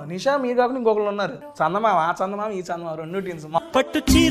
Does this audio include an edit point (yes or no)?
yes